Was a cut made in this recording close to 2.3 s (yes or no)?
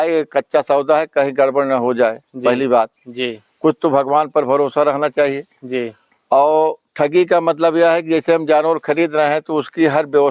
no